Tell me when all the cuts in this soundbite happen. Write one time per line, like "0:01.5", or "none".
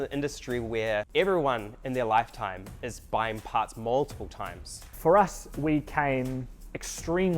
0:04.8